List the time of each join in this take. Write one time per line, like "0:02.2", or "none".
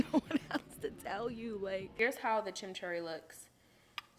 0:01.9